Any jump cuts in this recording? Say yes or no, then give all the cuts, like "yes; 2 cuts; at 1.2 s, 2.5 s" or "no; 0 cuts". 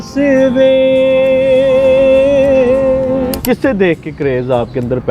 yes; 1 cut; at 3.4 s